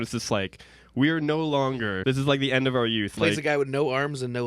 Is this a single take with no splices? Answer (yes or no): no